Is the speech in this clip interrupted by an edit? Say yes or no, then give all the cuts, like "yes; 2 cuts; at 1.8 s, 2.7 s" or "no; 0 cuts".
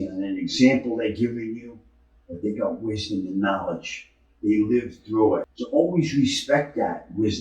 yes; 1 cut; at 5.6 s